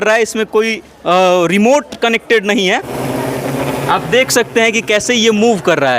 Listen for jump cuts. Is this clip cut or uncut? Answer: cut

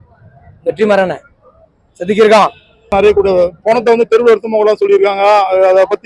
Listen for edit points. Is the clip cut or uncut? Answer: cut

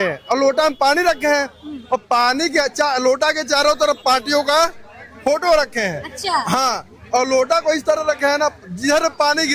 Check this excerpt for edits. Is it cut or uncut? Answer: uncut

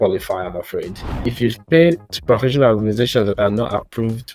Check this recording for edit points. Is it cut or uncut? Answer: cut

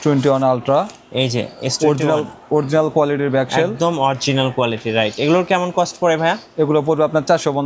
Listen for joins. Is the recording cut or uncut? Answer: uncut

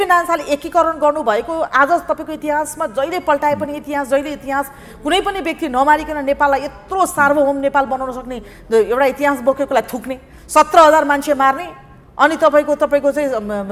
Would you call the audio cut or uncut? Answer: uncut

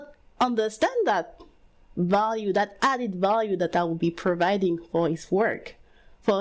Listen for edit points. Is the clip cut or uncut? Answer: uncut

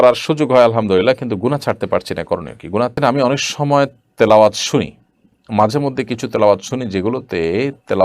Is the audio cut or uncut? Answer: cut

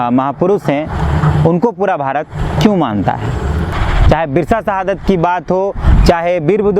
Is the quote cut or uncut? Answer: cut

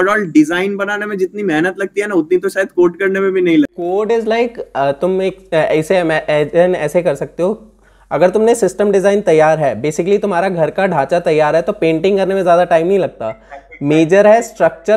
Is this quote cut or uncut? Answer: uncut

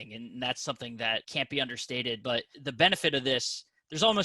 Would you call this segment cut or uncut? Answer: cut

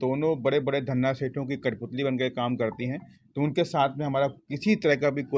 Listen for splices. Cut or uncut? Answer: uncut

